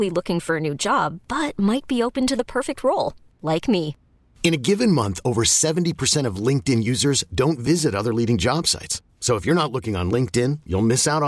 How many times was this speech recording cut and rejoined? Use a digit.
0